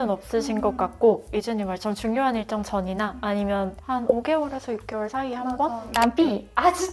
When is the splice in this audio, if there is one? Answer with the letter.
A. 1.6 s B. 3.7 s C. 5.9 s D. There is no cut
C